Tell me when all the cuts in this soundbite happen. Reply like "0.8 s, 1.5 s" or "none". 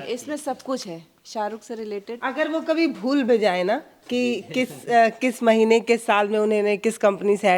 none